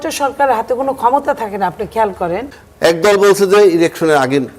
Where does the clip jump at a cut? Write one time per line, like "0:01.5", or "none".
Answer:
0:02.6